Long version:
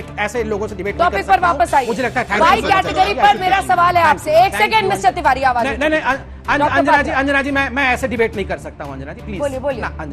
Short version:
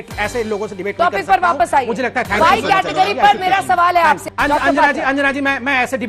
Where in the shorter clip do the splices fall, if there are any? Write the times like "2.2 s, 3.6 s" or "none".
4.2 s